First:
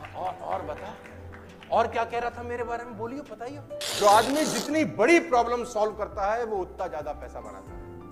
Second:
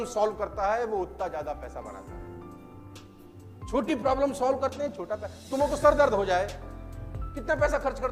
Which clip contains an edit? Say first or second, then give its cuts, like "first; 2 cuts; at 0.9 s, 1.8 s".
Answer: first; 1 cut; at 3.8 s